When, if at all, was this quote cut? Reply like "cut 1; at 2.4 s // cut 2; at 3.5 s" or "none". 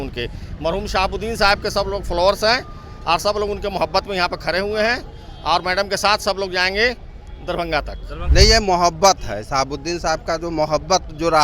cut 1; at 8.1 s